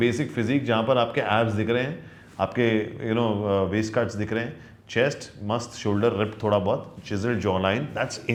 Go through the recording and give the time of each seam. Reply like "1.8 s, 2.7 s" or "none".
none